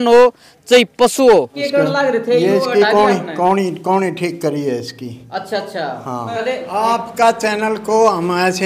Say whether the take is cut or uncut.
cut